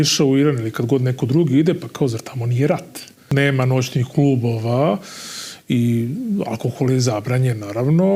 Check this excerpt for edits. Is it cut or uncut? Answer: cut